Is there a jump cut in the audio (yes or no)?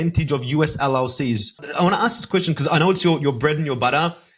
yes